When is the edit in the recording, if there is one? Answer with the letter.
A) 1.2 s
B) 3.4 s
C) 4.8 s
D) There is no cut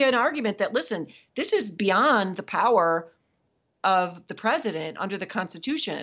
B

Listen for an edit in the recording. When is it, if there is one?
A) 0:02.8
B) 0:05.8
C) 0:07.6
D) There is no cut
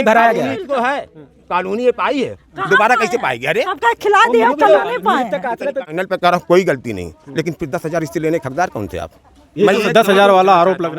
B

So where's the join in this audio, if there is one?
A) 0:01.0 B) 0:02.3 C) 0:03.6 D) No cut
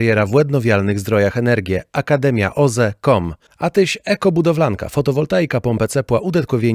D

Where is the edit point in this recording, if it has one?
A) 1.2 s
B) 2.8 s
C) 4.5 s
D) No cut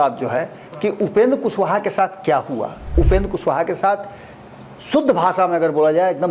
B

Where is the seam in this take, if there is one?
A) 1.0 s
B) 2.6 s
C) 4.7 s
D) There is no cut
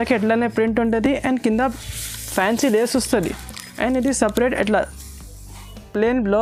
D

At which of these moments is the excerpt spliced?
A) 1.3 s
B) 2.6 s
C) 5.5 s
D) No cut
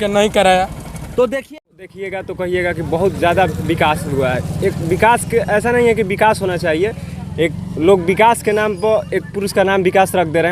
A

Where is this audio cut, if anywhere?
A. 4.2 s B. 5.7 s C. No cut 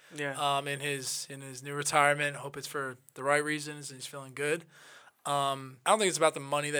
B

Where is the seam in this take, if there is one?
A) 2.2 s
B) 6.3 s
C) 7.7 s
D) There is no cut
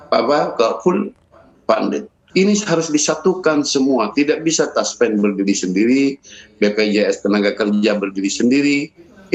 A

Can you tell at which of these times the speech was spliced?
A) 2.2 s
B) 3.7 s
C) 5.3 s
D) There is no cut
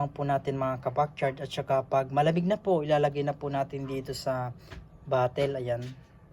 D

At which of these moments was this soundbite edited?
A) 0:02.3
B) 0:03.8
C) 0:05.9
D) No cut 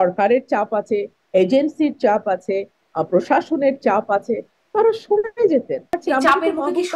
C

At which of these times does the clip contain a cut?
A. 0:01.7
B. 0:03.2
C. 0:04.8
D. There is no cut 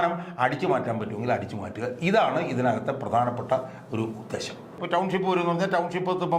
C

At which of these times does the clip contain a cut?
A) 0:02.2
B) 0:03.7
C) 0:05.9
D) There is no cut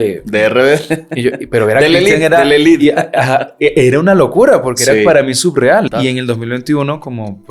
C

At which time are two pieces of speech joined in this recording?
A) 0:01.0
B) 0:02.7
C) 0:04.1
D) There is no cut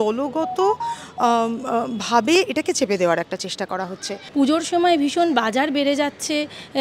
C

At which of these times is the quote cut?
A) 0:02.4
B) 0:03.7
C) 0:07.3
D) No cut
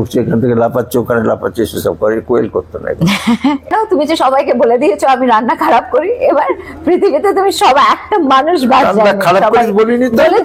B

